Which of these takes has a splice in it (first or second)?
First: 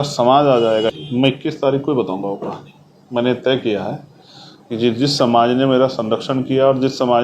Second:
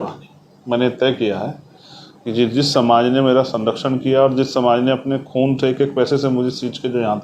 first